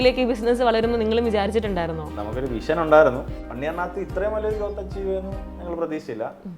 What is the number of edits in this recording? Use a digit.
1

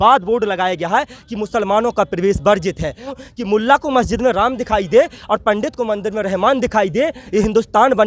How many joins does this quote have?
1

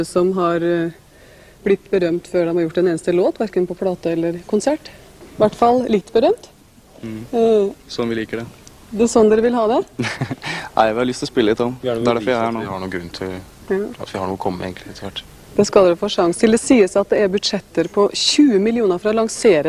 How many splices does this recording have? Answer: 1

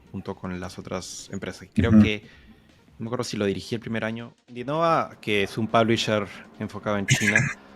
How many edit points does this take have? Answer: 1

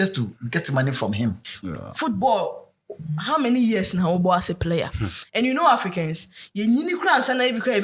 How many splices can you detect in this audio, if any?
1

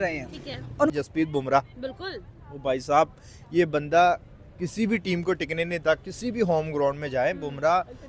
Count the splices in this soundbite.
1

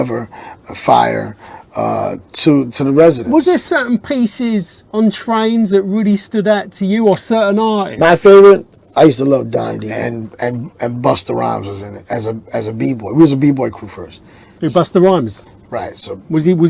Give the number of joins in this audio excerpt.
2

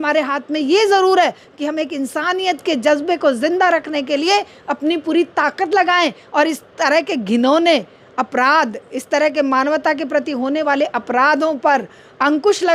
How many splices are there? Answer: 0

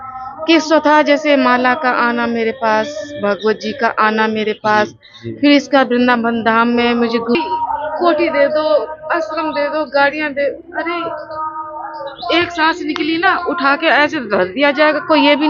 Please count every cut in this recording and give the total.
1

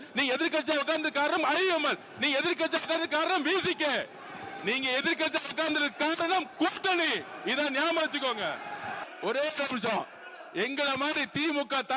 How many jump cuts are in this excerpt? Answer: 1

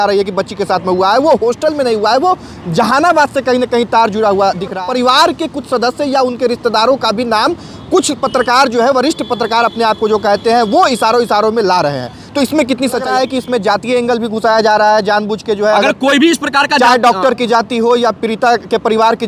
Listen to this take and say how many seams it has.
2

